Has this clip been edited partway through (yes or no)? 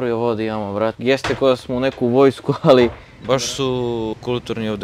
yes